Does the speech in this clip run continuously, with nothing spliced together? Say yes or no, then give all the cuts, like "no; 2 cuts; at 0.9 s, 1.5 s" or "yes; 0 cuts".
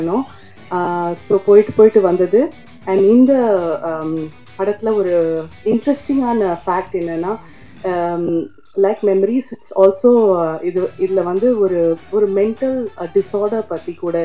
yes; 0 cuts